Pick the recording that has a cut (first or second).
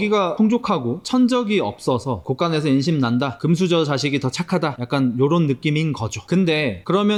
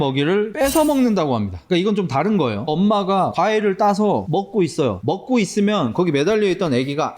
second